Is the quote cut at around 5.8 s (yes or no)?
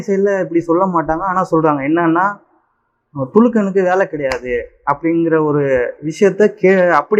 no